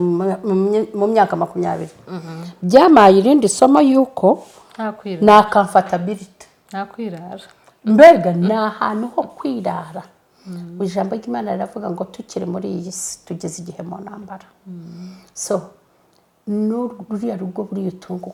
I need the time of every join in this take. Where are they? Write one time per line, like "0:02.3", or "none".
none

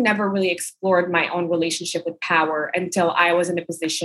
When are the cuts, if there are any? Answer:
none

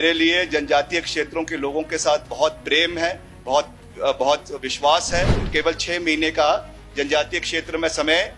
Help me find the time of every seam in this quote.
0:05.4

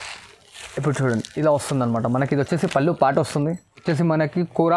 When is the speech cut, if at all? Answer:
0:03.8

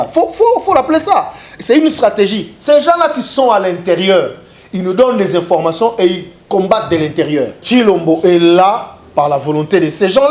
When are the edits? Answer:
0:07.6

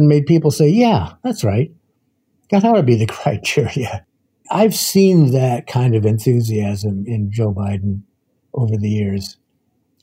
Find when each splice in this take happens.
0:04.4

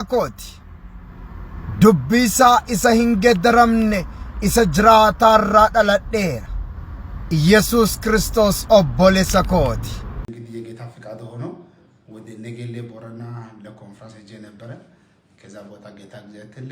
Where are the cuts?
0:10.3

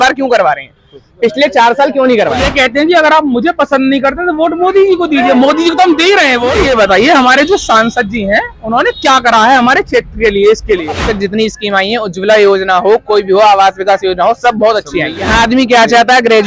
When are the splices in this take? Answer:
0:02.4
0:06.6
0:11.0
0:15.2

